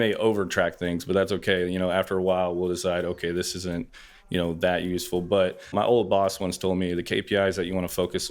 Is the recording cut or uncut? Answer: cut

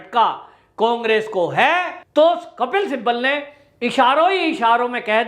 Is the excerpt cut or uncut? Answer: cut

